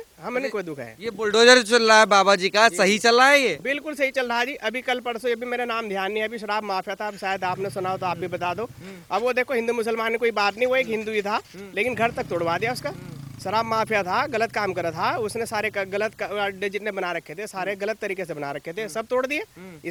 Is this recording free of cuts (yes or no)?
yes